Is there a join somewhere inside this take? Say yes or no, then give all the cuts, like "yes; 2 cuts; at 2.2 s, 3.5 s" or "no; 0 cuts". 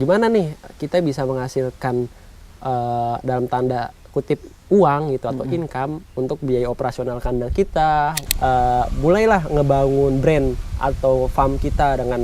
yes; 1 cut; at 8.2 s